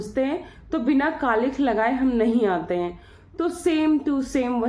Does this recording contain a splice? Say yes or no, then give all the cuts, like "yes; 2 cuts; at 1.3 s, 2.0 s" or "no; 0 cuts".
no; 0 cuts